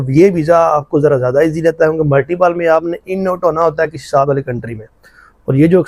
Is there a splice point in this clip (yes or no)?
no